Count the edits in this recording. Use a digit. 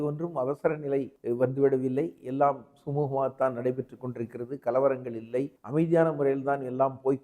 2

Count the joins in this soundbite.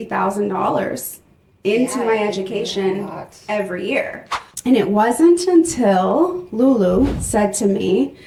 0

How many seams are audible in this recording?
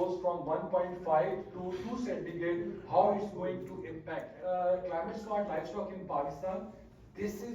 1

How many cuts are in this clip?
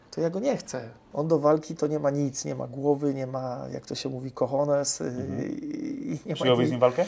1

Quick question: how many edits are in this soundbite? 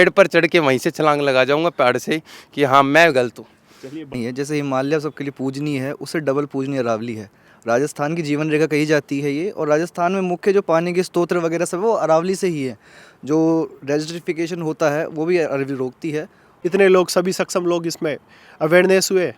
2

